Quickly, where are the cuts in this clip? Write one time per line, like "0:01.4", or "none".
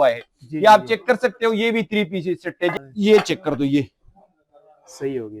0:02.7